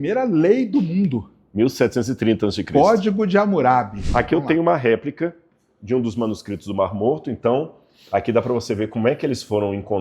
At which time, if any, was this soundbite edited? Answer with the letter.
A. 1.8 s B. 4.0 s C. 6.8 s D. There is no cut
B